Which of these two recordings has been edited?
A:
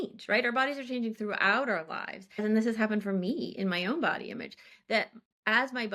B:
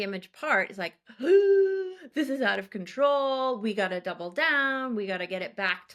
A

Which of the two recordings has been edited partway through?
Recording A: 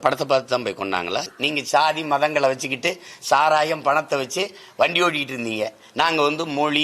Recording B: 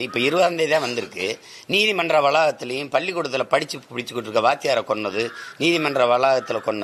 A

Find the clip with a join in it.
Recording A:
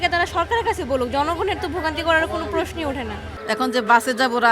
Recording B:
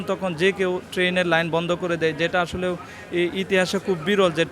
A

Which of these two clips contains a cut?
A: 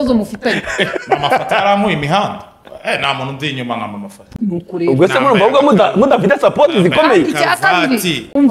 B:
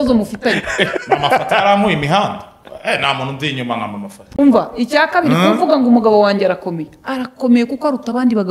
B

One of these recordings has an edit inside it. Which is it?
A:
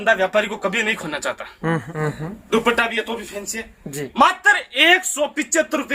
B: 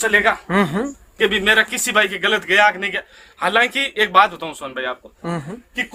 A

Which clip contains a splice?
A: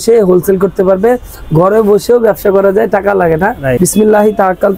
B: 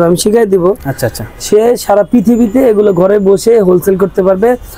A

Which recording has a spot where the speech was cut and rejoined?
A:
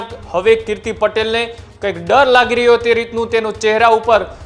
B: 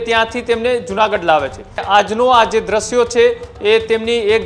B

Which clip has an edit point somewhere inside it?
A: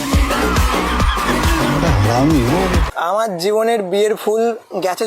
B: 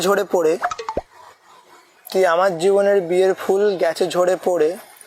A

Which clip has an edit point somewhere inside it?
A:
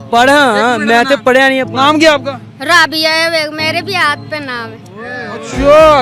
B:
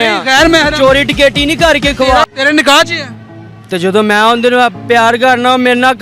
B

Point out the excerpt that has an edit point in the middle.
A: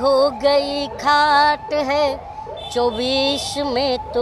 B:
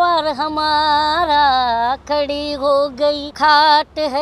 B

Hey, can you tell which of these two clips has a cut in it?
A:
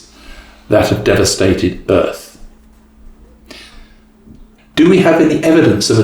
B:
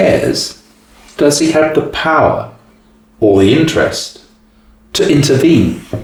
A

